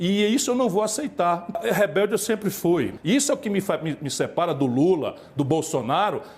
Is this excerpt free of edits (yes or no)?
no